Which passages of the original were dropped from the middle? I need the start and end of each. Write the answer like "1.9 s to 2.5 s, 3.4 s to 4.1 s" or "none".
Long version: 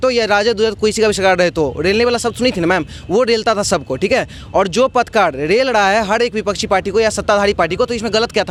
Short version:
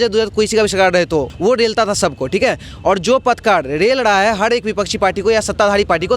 1.8 s to 3.0 s